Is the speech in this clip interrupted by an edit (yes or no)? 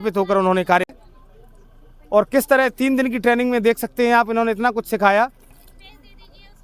yes